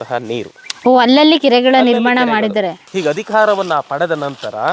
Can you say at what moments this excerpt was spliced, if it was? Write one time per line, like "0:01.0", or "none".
0:02.8

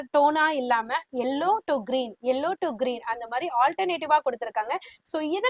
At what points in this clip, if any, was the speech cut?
none

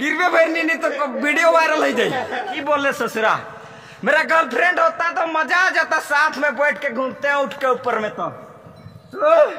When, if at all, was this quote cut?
0:02.6

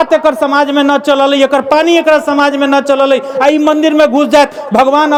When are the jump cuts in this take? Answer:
none

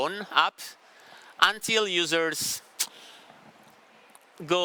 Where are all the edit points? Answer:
none

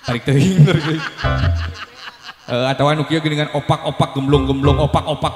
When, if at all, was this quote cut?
none

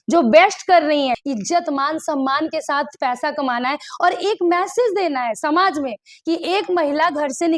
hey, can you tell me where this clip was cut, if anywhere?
0:01.2

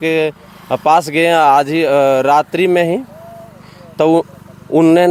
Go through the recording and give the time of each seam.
none

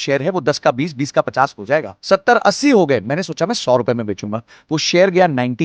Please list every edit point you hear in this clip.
0:01.9

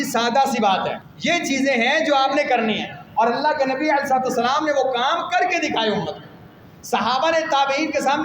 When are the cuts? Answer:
0:01.1

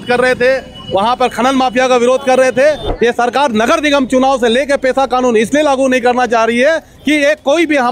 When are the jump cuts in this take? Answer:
0:02.9

